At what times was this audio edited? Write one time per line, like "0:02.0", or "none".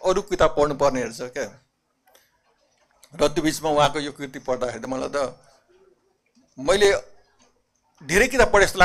0:02.5

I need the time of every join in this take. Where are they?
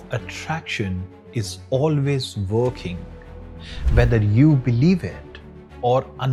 none

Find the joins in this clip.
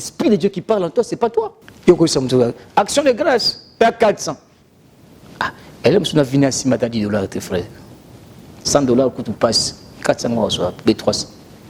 0:01.6

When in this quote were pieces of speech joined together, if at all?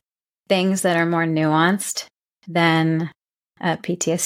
none

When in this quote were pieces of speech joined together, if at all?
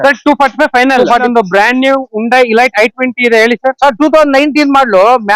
0:01.2

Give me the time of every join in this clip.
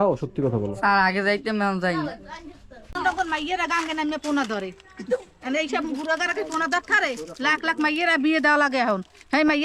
0:03.0

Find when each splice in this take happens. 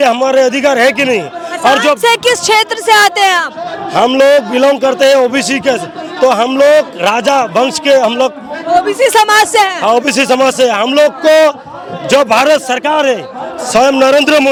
none

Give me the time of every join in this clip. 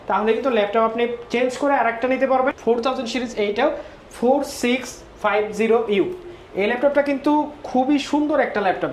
0:02.6

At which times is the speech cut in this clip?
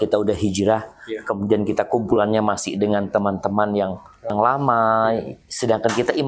0:04.3

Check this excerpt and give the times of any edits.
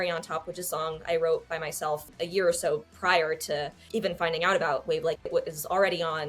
0:02.1
0:03.8

